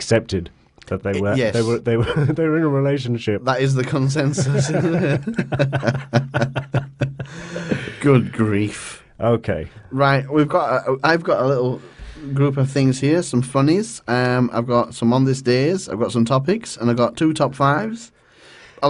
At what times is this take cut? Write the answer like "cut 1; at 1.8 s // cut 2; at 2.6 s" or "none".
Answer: cut 1; at 11.2 s